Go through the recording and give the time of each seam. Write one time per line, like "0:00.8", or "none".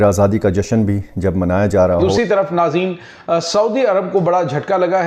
0:02.1